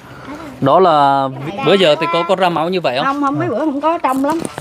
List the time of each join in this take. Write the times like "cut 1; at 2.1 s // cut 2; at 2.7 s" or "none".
cut 1; at 1.4 s